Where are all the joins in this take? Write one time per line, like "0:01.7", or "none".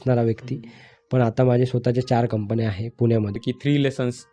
0:03.4